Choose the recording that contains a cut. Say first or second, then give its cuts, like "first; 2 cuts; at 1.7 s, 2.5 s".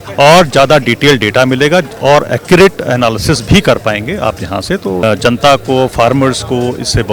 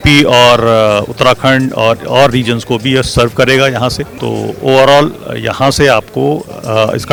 first; 1 cut; at 5.0 s